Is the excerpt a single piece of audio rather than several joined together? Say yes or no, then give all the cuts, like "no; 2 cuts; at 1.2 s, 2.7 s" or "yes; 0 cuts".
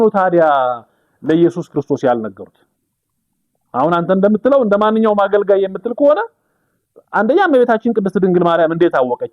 yes; 0 cuts